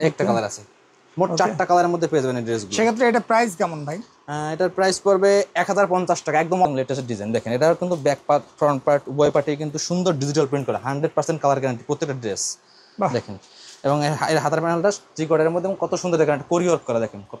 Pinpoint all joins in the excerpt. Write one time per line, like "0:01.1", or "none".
0:06.6

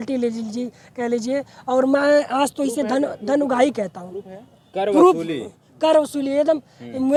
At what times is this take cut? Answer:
none

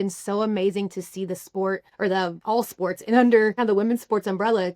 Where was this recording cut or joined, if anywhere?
0:02.1
0:03.6

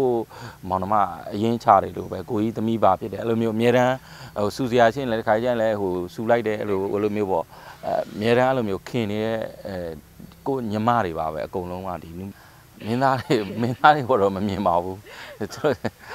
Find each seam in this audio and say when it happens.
0:12.3

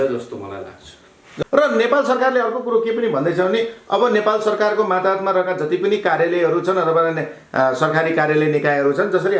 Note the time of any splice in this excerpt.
0:01.3

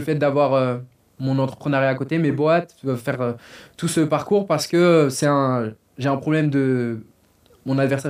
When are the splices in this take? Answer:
none

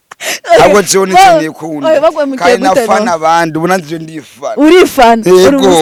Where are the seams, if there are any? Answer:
none

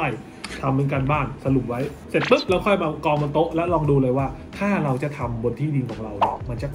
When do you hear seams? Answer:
0:02.0

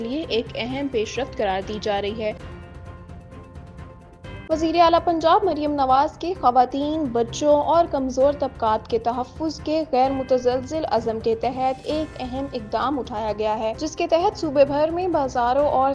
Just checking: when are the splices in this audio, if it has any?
0:02.4
0:04.5

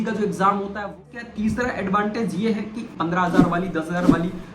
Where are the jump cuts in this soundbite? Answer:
0:01.0
0:02.9

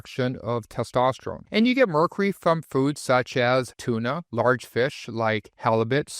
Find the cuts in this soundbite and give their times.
0:01.4

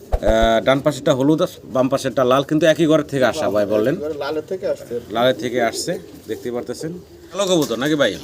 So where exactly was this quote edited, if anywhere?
0:07.2

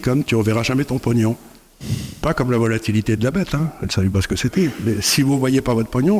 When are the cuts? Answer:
none

